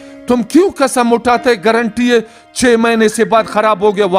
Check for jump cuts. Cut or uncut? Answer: uncut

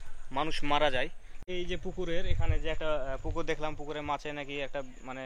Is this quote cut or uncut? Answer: cut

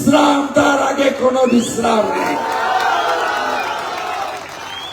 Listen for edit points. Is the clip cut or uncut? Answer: uncut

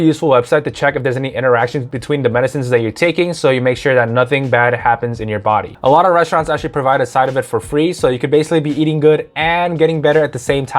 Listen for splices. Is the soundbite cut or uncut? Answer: cut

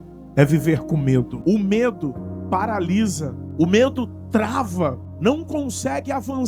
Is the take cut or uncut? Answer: cut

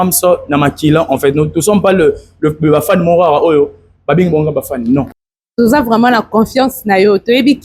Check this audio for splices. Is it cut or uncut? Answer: cut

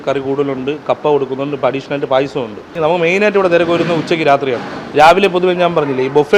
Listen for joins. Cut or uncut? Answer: cut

